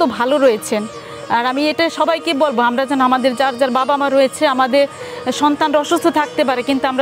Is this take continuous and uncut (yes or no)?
yes